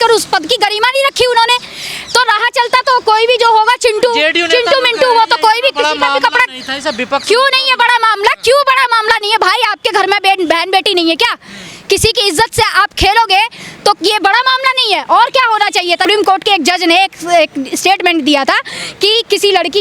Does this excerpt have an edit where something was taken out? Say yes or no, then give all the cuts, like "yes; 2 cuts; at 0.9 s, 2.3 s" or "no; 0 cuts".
no; 0 cuts